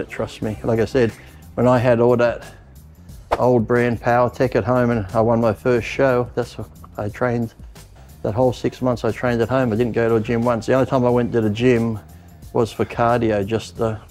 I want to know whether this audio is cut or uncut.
uncut